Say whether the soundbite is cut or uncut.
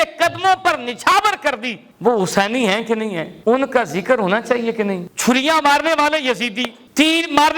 cut